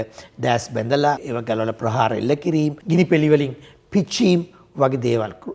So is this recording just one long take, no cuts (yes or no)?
no